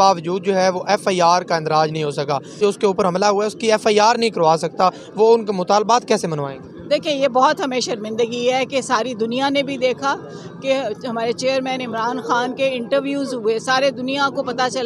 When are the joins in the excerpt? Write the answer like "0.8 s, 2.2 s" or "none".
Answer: none